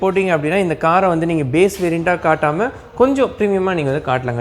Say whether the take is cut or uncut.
uncut